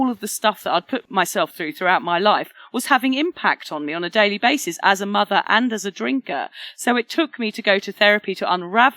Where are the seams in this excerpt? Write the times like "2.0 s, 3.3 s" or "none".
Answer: 1.0 s